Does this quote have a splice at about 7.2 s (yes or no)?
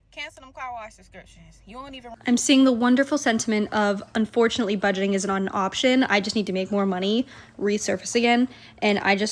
no